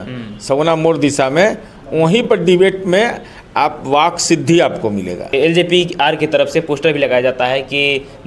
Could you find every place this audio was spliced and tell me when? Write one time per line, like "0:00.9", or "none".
0:05.2